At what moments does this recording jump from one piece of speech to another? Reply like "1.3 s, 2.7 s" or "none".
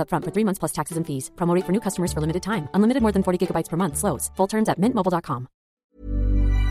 5.8 s

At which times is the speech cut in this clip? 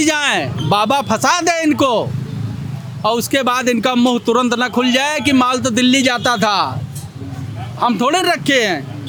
none

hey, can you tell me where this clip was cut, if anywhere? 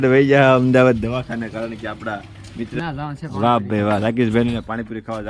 2.8 s

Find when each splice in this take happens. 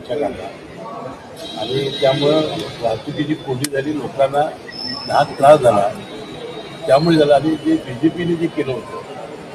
none

